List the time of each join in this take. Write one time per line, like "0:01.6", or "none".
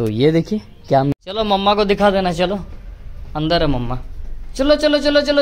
0:01.1